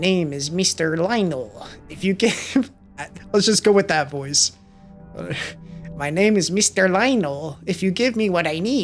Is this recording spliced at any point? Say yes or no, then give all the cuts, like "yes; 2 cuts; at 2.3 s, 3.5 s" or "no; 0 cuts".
no; 0 cuts